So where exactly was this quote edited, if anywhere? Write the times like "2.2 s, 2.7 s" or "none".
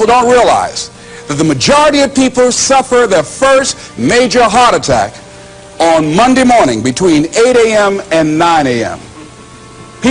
none